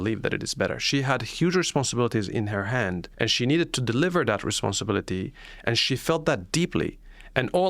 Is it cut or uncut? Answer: cut